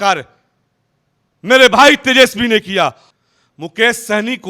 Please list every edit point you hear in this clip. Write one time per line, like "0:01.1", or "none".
0:03.1